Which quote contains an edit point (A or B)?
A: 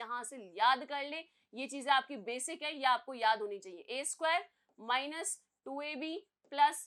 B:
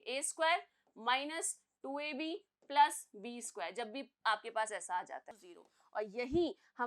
B